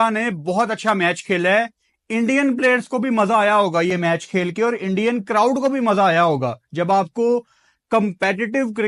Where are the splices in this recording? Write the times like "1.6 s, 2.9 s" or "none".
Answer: none

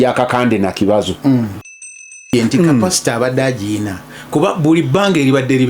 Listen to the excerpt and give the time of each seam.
1.9 s

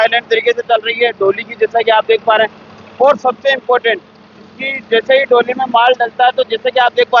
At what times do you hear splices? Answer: none

